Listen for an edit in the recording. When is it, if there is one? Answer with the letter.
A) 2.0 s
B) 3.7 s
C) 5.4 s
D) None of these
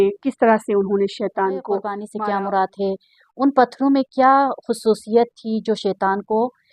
A